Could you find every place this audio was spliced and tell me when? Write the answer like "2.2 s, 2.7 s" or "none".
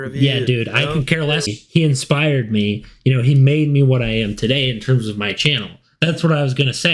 1.5 s